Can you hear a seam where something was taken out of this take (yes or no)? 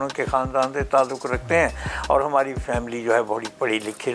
no